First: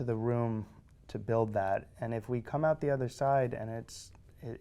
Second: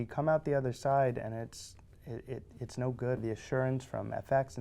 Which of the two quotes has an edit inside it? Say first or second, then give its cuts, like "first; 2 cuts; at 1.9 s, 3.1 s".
second; 1 cut; at 3.2 s